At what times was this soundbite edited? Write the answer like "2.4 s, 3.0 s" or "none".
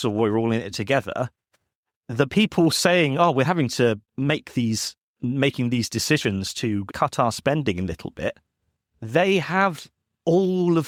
none